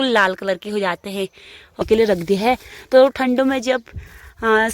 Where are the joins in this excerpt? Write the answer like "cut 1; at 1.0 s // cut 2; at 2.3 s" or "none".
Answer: cut 1; at 1.8 s